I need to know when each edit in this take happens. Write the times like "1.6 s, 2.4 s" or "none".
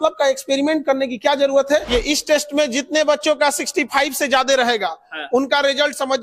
1.9 s